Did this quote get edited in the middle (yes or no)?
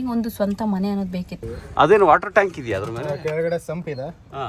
yes